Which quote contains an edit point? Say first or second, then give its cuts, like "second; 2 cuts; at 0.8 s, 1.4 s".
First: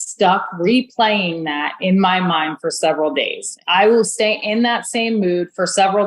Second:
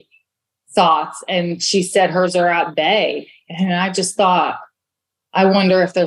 first; 1 cut; at 3.6 s